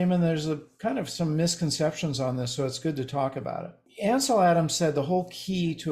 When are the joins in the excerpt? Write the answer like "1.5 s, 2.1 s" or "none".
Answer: 3.9 s